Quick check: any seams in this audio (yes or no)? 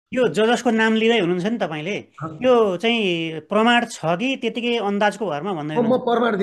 no